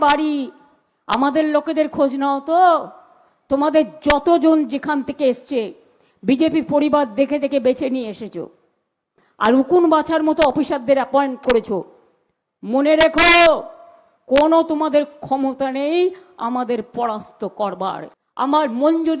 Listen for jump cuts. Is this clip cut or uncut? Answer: cut